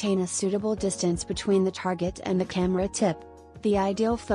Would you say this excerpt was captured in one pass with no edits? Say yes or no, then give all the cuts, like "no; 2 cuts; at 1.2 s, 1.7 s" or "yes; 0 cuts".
yes; 0 cuts